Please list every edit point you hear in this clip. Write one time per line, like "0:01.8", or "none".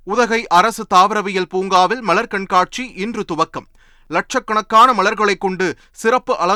none